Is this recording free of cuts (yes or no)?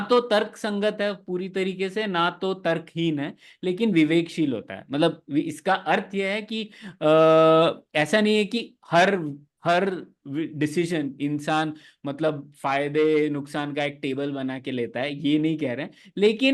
yes